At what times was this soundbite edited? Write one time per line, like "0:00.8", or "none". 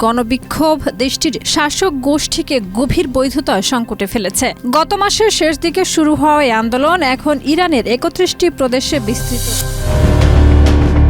0:09.3

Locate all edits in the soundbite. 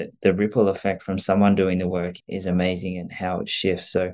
0:02.2

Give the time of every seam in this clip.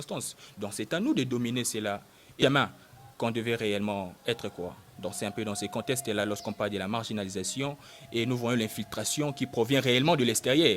0:02.2

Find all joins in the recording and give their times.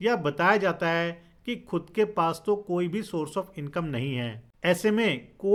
none

